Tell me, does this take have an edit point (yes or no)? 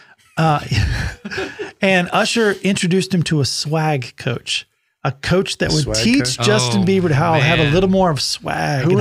no